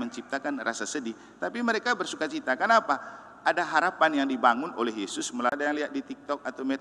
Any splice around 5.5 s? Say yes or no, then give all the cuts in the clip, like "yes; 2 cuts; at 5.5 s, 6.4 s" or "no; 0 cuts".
yes; 1 cut; at 5.5 s